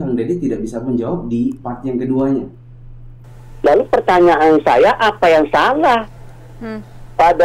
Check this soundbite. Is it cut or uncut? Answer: uncut